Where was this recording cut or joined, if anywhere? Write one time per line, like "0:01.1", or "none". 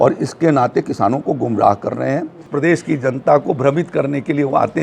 0:02.5